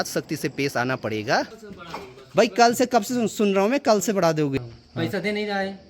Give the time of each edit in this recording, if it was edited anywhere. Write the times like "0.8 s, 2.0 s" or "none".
1.5 s, 4.6 s